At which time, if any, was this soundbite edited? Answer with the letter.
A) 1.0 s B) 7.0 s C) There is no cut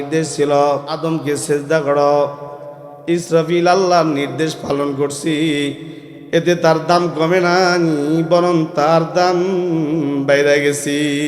A